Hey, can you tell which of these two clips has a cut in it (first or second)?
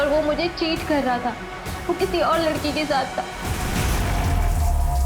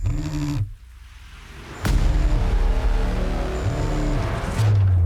first